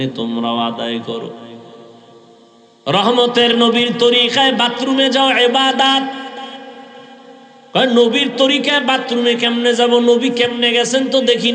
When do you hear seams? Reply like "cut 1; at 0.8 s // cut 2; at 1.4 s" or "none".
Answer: cut 1; at 2.7 s